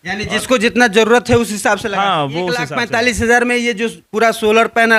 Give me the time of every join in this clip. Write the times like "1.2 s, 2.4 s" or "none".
2.7 s